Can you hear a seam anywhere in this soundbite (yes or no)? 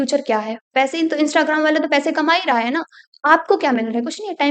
no